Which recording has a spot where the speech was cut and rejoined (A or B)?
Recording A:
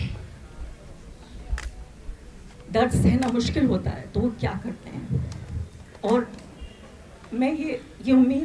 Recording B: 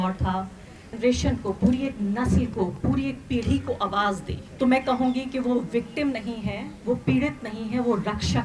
B